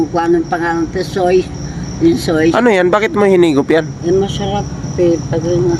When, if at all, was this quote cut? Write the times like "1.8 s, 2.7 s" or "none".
none

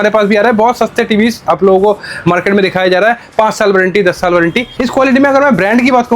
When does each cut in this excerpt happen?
4.6 s

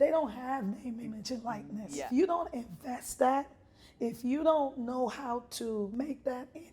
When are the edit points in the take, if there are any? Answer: 2.0 s, 5.9 s

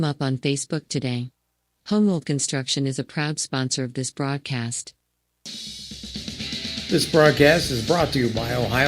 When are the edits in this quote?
4.8 s

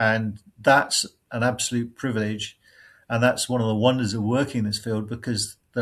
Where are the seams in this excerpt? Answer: none

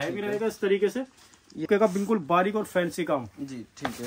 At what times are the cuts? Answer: 1.6 s

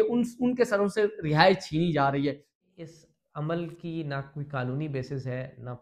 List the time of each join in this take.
2.5 s

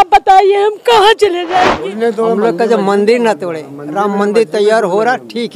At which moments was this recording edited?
1.7 s

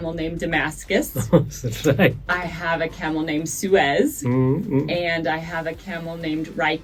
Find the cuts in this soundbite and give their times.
none

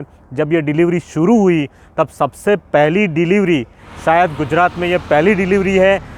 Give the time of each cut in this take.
3.8 s

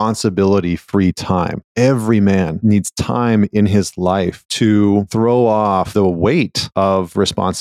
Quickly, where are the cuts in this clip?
1.6 s, 2.5 s, 4.4 s, 5.1 s, 5.9 s, 6.6 s

